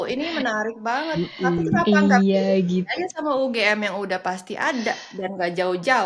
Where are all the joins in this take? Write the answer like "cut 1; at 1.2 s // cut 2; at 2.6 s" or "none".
none